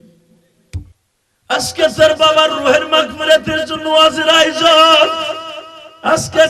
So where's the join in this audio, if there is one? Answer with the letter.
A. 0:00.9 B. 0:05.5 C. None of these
A